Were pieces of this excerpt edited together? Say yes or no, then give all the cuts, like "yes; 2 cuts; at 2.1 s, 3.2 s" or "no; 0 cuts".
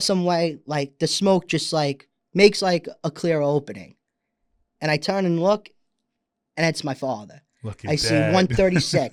no; 0 cuts